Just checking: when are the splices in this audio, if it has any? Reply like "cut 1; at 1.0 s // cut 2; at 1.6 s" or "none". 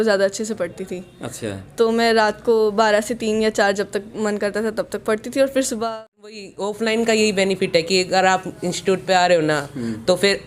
cut 1; at 6.3 s